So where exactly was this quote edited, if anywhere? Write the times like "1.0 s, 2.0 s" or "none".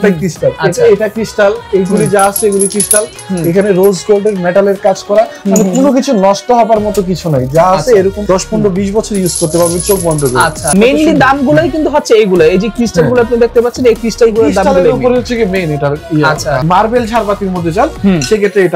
10.6 s, 16.6 s